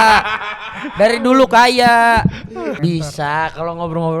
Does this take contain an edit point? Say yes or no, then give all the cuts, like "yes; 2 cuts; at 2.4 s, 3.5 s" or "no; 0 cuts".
yes; 1 cut; at 2.8 s